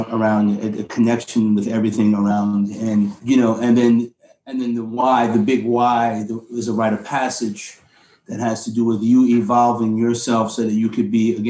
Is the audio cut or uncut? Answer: cut